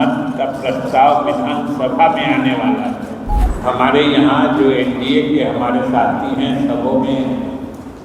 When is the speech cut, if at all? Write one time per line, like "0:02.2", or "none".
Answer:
0:03.5